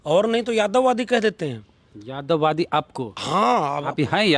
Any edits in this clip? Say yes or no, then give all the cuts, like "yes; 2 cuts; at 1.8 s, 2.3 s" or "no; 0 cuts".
no; 0 cuts